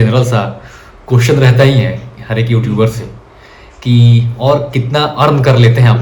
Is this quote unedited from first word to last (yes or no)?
yes